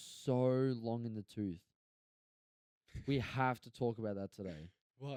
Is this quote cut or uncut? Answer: uncut